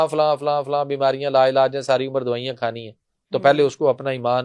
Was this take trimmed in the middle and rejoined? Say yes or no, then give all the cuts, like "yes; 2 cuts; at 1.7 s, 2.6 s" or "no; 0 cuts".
no; 0 cuts